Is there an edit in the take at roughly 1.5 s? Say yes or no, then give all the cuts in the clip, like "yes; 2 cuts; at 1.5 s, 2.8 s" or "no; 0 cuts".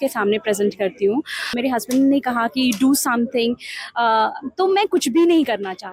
yes; 1 cut; at 1.5 s